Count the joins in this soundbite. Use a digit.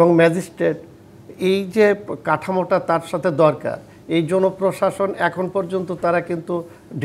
0